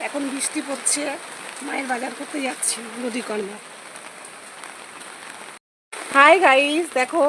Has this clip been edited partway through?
yes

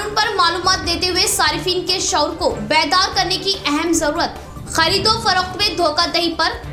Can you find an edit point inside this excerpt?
no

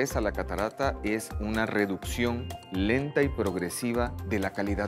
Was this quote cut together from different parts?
no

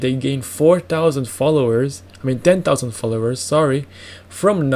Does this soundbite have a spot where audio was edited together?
no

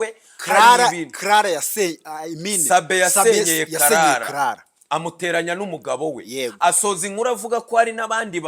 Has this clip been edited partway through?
no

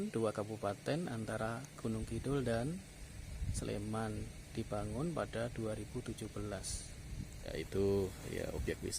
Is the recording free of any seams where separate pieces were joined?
no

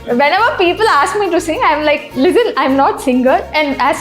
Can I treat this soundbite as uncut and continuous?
no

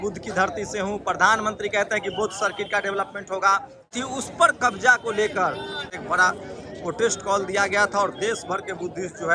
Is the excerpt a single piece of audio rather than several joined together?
no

